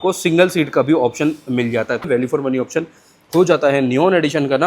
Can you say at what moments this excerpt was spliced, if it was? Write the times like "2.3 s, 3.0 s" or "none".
2.1 s